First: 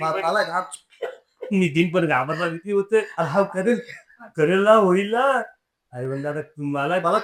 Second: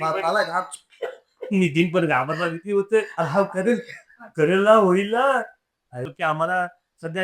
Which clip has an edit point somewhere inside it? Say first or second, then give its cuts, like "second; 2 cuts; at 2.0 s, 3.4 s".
second; 1 cut; at 6.1 s